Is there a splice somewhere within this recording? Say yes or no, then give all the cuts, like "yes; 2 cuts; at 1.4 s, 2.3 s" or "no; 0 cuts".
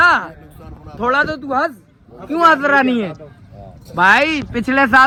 no; 0 cuts